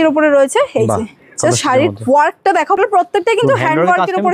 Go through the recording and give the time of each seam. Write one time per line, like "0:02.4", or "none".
0:02.8

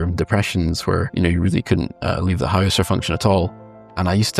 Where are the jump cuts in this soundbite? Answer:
0:01.1
0:03.5

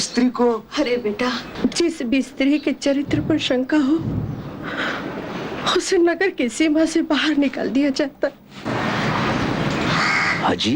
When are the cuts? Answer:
0:01.5

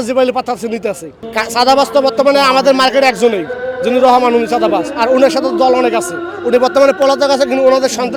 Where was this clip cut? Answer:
none

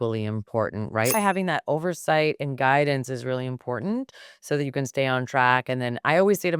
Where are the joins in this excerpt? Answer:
0:01.1

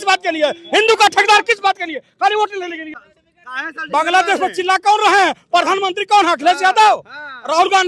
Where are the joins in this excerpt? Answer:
0:02.8

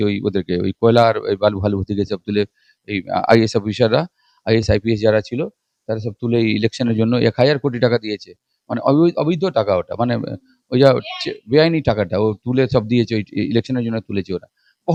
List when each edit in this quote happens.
none

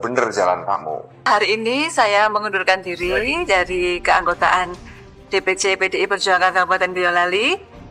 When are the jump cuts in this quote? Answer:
0:01.2

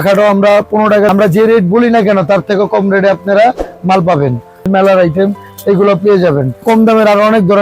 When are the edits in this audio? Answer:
0:01.1
0:04.7
0:06.6

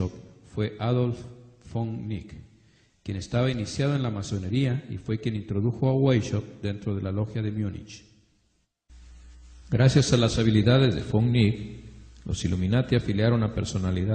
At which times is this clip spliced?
0:07.8

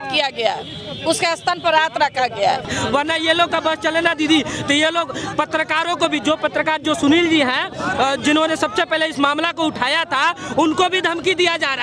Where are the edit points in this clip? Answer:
0:02.7

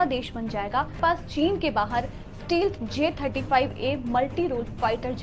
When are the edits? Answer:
none

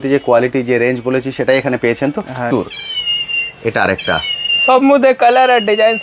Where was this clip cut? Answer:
0:02.5

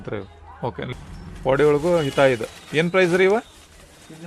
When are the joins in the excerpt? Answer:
0:00.9

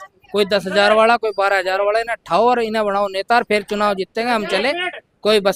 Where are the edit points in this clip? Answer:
none

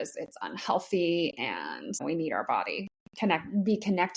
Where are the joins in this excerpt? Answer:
0:02.0

